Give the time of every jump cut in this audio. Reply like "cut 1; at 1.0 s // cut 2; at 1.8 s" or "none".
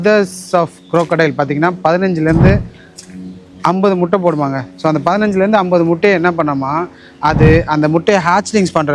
none